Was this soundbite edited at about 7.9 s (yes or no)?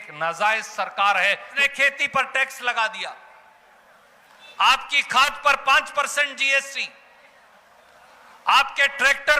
no